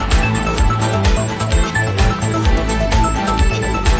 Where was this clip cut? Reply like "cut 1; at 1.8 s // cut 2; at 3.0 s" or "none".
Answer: cut 1; at 1.6 s